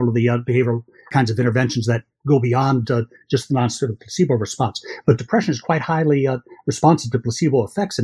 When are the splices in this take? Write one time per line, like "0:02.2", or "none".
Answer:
none